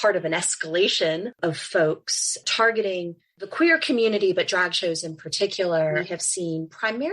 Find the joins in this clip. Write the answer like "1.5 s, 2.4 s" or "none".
1.3 s, 6.0 s